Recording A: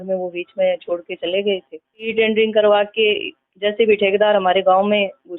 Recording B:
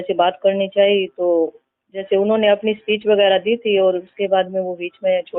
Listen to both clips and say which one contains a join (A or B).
A